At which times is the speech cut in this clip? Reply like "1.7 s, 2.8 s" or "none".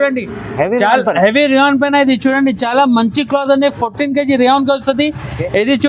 none

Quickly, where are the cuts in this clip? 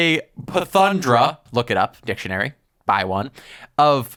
none

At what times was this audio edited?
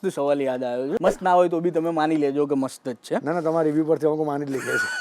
1.0 s

